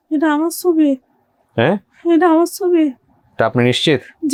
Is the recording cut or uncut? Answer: uncut